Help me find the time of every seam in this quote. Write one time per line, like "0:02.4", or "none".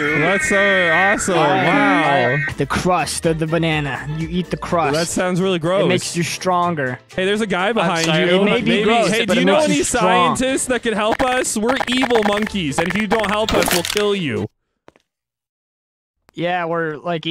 0:02.4